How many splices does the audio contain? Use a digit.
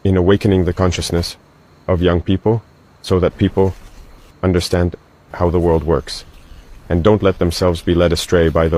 0